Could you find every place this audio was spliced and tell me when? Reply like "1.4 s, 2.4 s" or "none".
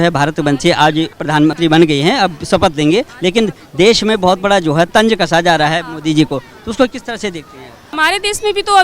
1.4 s, 3.1 s, 4.9 s, 7.8 s